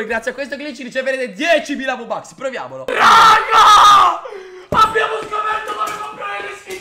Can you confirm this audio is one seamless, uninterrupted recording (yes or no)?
no